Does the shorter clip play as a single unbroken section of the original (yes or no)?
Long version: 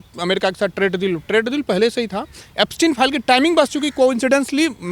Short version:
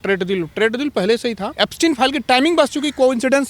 no